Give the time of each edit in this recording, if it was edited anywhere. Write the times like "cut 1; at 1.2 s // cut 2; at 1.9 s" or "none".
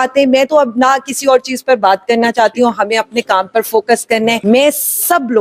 cut 1; at 4.4 s